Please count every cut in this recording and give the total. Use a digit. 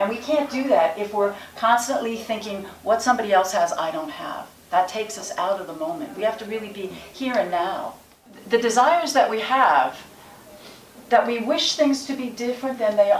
1